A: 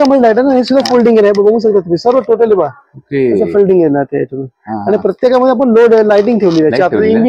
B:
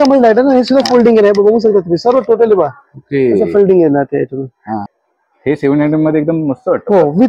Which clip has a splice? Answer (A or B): B